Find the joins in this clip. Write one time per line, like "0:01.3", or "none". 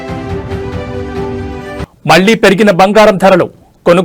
none